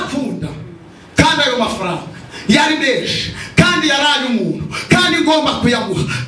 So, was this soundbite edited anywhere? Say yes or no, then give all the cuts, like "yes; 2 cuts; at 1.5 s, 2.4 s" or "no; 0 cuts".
no; 0 cuts